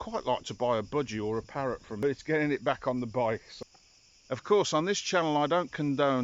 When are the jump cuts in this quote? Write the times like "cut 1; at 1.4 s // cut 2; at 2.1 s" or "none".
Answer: cut 1; at 2.0 s // cut 2; at 3.5 s